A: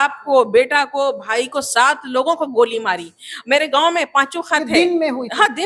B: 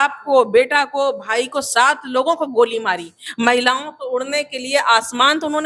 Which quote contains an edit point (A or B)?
B